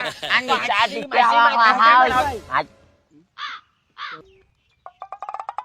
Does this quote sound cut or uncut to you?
cut